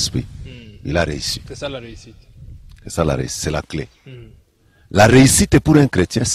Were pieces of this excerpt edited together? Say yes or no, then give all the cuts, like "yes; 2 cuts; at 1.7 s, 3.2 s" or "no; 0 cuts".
no; 0 cuts